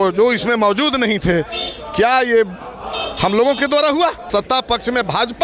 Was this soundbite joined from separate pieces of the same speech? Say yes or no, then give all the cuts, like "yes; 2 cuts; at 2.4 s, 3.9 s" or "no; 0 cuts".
yes; 1 cut; at 4.2 s